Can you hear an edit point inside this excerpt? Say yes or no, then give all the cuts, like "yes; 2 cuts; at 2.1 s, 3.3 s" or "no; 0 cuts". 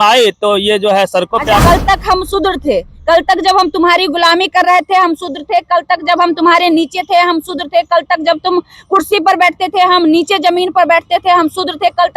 yes; 1 cut; at 1.6 s